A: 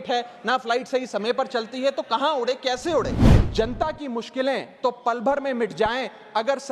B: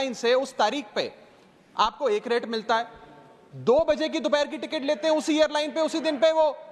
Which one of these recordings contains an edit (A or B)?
A